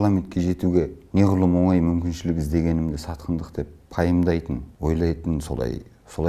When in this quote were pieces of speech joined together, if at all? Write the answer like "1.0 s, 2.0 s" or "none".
1.0 s, 4.7 s